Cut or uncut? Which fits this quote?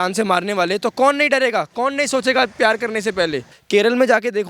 cut